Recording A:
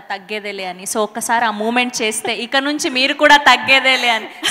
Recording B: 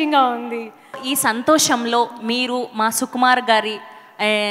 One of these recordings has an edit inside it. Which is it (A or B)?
B